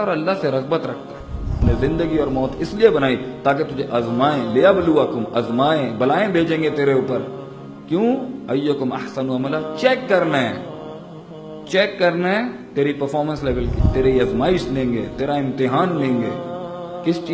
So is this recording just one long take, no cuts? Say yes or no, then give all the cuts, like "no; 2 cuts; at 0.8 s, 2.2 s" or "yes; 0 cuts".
no; 2 cuts; at 1.6 s, 13.8 s